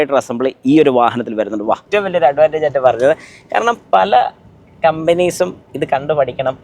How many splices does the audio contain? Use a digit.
1